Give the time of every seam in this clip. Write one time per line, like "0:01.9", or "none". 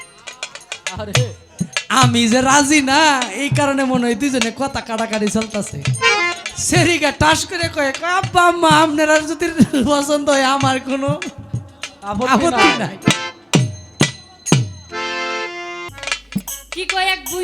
0:15.9